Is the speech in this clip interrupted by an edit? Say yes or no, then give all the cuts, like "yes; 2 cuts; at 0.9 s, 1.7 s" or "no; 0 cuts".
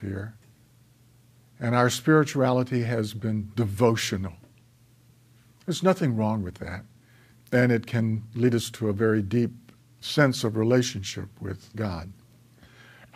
no; 0 cuts